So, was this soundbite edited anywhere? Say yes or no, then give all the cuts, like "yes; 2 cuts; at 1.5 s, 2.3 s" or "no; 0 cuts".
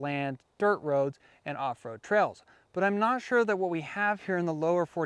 no; 0 cuts